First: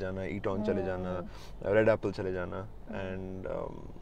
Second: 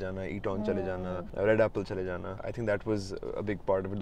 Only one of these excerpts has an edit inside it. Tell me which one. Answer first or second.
second